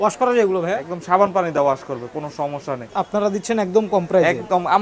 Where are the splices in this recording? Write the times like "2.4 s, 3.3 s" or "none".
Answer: 2.9 s